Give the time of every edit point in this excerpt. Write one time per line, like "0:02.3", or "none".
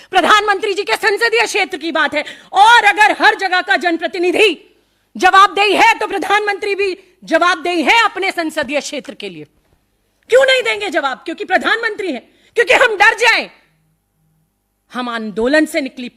none

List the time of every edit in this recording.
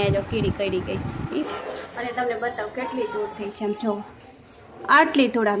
0:01.4

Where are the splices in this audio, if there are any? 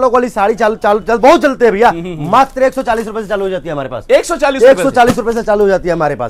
none

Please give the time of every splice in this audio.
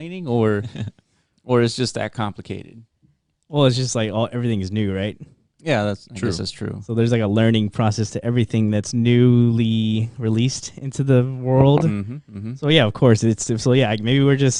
none

